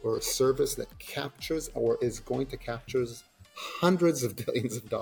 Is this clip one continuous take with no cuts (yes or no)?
yes